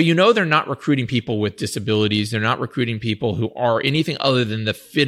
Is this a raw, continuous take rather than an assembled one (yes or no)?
yes